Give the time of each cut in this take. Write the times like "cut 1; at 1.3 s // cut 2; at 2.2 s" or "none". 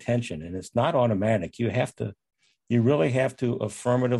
none